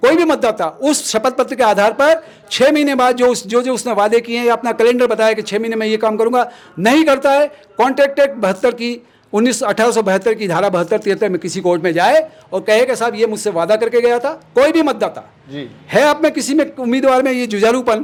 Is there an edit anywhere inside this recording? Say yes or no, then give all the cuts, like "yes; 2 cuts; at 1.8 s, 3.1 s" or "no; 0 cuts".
no; 0 cuts